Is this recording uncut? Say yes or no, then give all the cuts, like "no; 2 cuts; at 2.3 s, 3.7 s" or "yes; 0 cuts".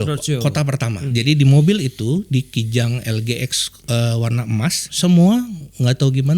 no; 2 cuts; at 1.0 s, 4.9 s